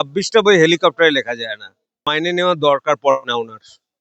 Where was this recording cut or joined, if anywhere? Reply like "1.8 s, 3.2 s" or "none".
2.1 s